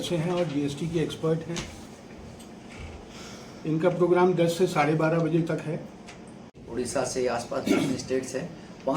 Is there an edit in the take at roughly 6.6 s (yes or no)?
yes